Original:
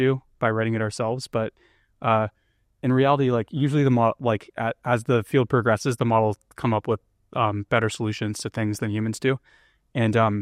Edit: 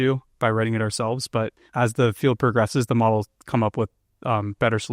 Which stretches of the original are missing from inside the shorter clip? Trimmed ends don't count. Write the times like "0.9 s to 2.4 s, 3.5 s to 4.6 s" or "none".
1.7 s to 4.8 s